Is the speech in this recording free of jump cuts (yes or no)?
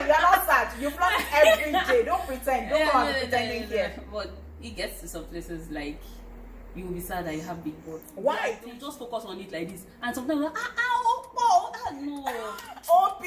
no